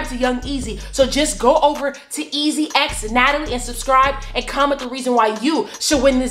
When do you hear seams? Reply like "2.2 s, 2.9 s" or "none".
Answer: none